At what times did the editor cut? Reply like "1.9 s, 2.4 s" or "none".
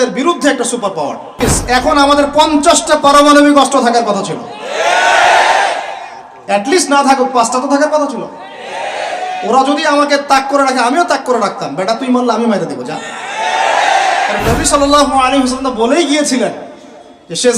1.4 s, 14.4 s